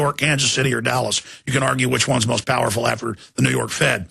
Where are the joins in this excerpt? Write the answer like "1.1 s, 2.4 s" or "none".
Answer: 2.5 s